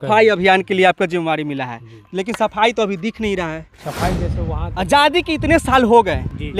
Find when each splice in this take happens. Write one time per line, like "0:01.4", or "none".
0:04.4